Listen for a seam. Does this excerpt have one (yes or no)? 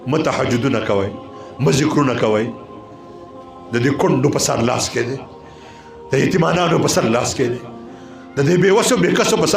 no